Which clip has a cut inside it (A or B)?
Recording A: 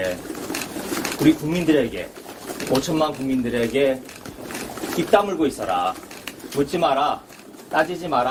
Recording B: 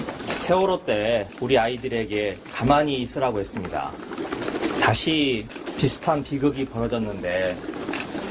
B